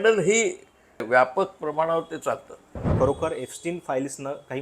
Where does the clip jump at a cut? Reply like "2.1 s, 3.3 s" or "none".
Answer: 1.0 s, 2.8 s

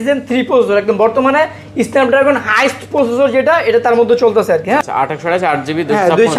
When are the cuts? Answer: 4.8 s

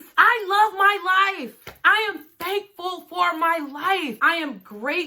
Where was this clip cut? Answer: none

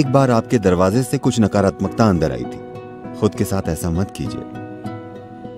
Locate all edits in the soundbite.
none

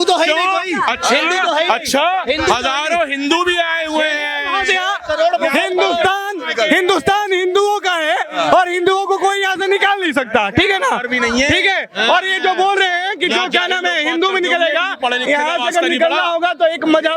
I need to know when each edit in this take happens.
none

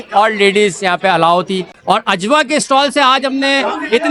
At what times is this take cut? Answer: 1.8 s

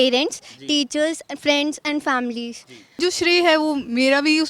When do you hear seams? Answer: 3.0 s

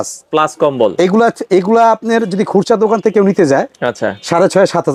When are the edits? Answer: none

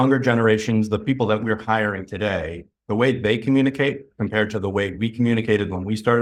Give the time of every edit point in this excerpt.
none

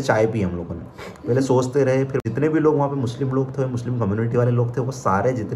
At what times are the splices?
2.2 s

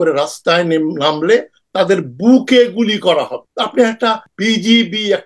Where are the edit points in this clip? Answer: 3.4 s, 4.3 s

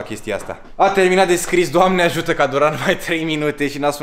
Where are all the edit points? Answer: none

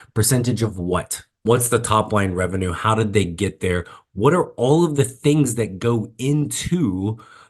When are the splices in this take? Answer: 1.4 s

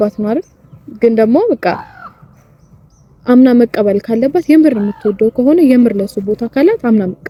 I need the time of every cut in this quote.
none

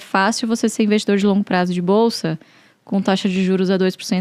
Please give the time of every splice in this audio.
none

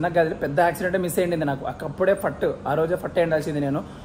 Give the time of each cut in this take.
none

